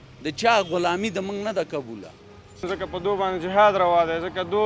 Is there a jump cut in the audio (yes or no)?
yes